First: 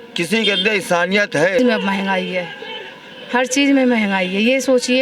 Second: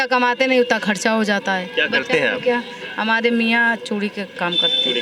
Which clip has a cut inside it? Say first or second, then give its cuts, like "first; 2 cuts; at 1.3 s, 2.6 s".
first; 1 cut; at 1.6 s